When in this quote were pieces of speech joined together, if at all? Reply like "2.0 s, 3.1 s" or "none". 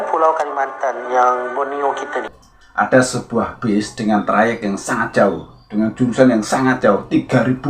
2.2 s